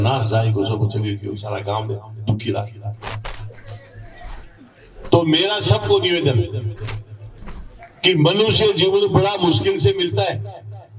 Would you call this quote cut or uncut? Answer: uncut